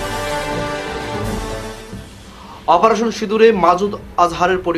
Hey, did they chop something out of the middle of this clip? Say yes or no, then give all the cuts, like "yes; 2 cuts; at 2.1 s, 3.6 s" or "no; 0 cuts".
yes; 1 cut; at 1.2 s